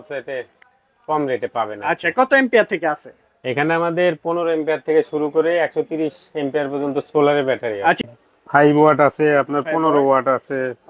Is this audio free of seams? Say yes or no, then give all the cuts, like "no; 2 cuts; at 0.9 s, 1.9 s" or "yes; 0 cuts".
no; 1 cut; at 8.1 s